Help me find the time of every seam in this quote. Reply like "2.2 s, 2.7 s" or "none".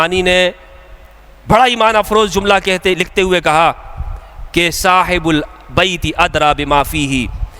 none